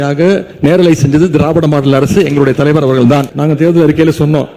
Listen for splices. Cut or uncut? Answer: cut